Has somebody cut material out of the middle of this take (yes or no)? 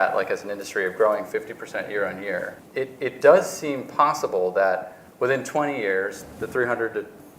yes